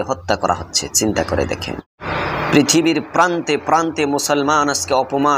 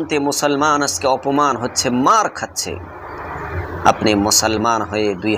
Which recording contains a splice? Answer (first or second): first